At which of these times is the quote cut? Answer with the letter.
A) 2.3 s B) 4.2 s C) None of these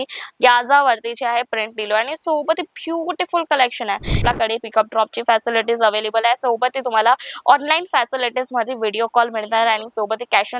B